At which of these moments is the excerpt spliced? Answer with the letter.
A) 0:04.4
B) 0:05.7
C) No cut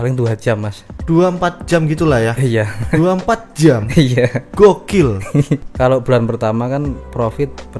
B